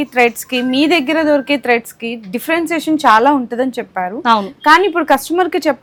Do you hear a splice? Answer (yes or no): no